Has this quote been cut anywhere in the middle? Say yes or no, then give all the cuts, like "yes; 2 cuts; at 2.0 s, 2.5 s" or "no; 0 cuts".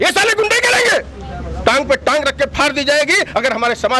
no; 0 cuts